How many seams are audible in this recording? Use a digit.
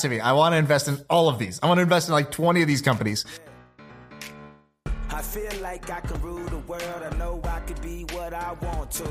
1